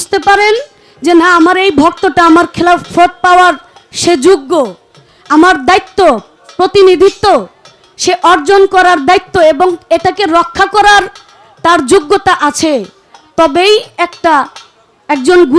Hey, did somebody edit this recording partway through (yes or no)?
no